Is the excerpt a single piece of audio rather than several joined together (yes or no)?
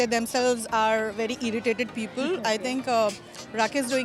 yes